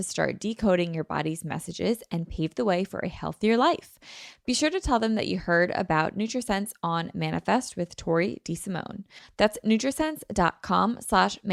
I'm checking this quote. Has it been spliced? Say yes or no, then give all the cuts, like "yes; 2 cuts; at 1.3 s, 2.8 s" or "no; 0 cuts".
no; 0 cuts